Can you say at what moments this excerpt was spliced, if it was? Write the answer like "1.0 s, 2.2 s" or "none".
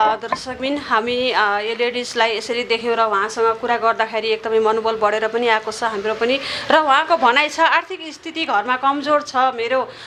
none